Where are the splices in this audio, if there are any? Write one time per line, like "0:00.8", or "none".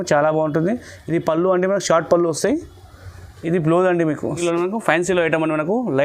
0:04.4

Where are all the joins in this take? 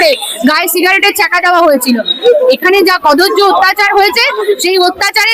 none

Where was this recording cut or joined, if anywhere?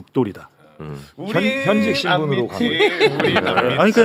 none

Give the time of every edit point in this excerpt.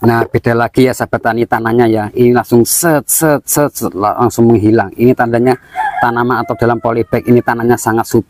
none

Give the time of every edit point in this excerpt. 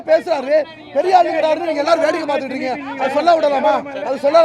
none

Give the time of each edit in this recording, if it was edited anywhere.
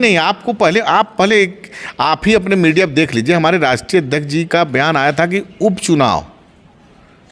none

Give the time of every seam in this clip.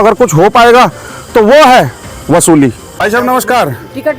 0:03.0

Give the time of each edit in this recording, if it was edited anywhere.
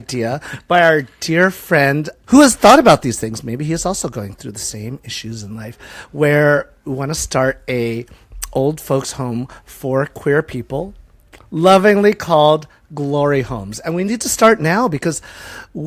0:02.1

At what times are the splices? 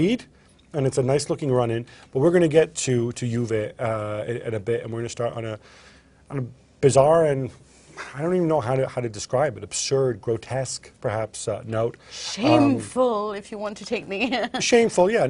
0:04.3

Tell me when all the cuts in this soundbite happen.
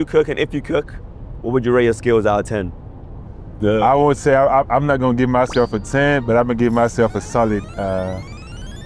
none

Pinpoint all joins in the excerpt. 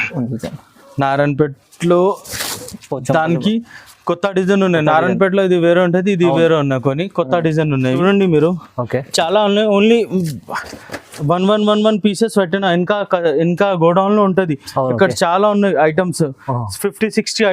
0:08.0

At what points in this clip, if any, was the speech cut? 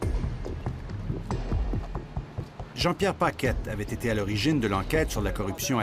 0:03.0

